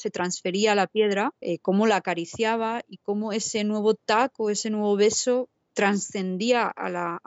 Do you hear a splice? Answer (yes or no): yes